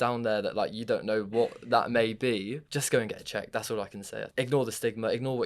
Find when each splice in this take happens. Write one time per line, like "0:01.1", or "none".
0:02.7
0:04.3